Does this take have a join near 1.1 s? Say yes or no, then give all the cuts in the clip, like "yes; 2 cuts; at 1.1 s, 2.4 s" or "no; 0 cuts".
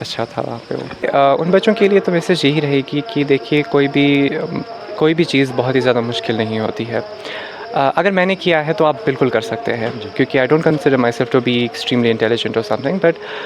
yes; 1 cut; at 1.1 s